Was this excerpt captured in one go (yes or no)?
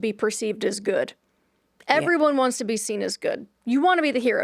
yes